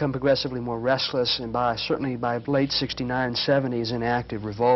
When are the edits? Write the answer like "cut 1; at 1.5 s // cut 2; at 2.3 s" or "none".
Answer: none